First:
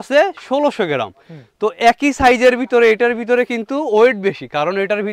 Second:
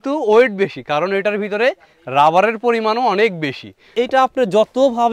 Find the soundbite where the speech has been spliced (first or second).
second